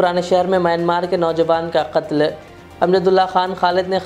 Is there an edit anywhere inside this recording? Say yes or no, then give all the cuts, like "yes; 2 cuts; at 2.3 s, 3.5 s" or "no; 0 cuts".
no; 0 cuts